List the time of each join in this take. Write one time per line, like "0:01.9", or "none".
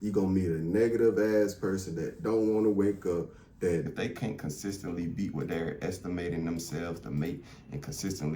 0:03.8